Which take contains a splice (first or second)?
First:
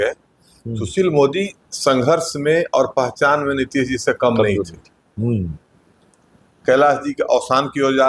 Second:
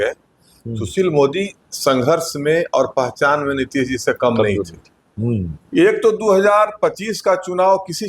second